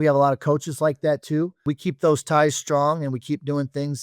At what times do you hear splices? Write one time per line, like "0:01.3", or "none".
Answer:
0:01.7